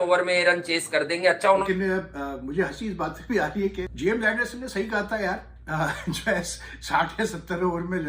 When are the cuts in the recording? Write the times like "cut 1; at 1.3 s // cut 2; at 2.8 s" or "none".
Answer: cut 1; at 1.7 s // cut 2; at 3.9 s